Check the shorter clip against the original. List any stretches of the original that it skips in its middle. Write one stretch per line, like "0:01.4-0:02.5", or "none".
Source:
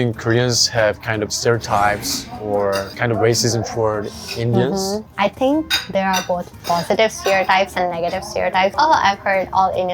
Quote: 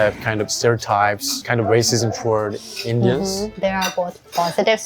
0:02.2-0:02.9
0:05.0-0:05.8